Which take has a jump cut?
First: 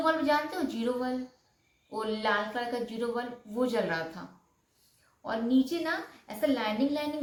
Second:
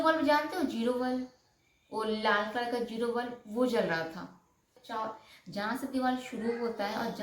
second; 1 cut; at 4.8 s

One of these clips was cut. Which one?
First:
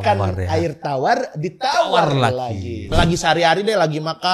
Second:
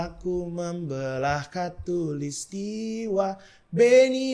first; 1 cut; at 2.9 s

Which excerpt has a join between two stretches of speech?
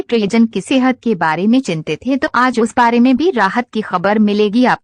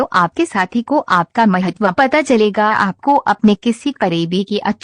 second; 2 cuts; at 1.8 s, 2.9 s

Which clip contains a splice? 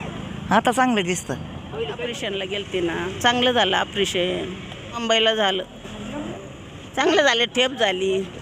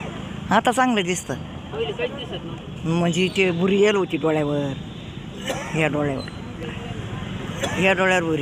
first; 3 cuts; at 2.3 s, 5.0 s, 6.3 s

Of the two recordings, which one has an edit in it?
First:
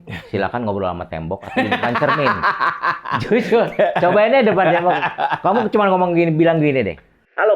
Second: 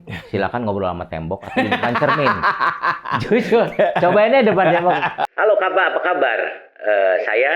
second; 1 cut; at 5.2 s

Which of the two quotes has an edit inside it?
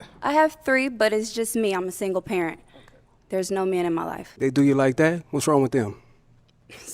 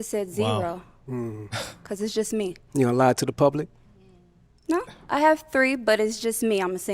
first; 1 cut; at 4.2 s

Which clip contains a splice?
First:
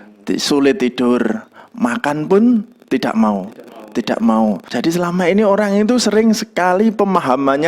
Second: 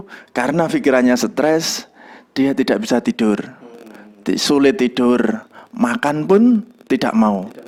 first; 1 cut; at 4.7 s

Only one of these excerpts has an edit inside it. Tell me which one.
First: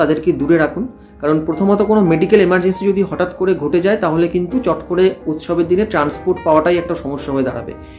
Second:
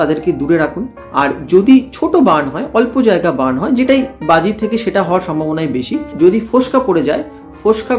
second; 2 cuts; at 1.0 s, 6.1 s

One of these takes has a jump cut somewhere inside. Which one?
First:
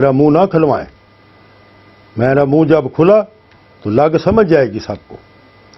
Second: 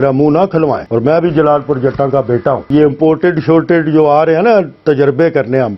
second; 2 cuts; at 0.8 s, 2.6 s

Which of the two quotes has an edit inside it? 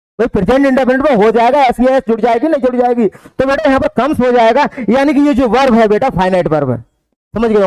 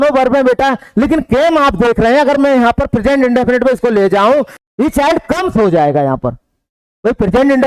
second; 1 cut; at 4.6 s

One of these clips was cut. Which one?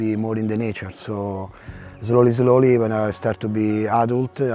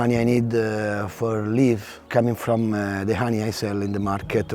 second; 1 cut; at 2.1 s

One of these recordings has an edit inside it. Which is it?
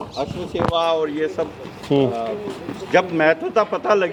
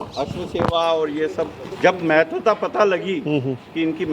second; 1 cut; at 1.6 s

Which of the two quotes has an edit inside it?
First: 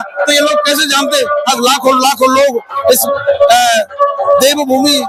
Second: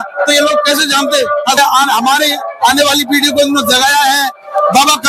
second; 1 cut; at 1.6 s

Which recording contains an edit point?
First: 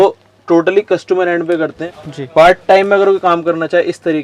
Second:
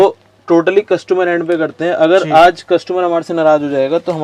first; 1 cut; at 1.8 s

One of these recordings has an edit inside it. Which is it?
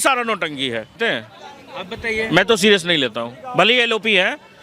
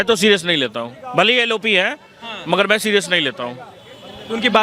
first; 1 cut; at 1.0 s

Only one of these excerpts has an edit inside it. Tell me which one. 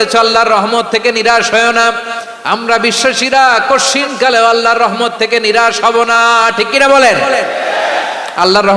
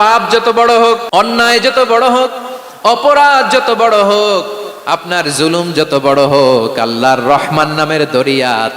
second; 1 cut; at 1.0 s

